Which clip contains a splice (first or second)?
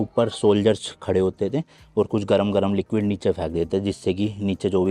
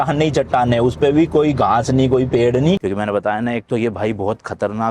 second